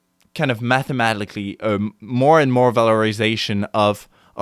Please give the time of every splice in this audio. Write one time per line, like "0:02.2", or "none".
none